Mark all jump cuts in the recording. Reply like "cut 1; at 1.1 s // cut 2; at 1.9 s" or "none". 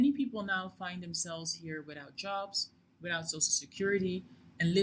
none